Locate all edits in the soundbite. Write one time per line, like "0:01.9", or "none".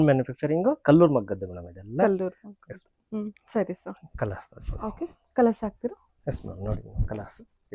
none